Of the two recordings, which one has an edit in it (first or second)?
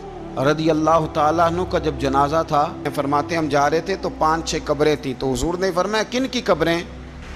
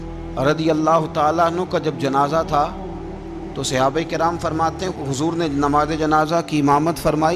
first